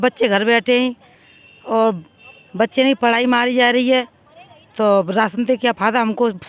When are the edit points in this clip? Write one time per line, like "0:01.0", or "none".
none